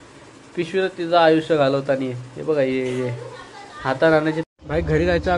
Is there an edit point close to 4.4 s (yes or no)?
yes